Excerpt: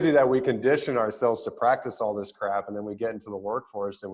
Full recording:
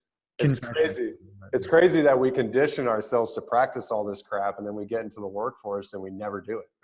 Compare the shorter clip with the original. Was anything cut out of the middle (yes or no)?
no